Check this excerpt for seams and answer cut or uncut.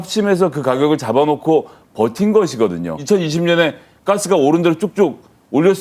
cut